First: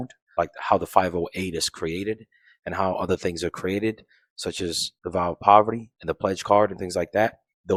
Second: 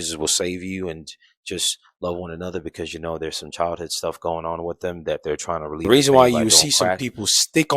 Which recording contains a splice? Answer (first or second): second